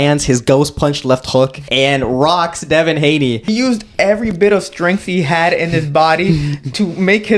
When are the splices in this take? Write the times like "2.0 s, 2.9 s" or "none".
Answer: 1.6 s, 3.5 s